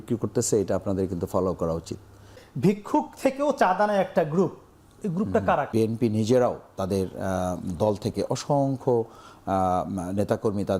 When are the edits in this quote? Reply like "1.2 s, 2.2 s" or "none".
2.4 s, 5.7 s